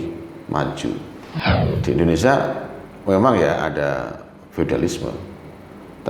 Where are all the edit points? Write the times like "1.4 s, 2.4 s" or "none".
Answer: 1.4 s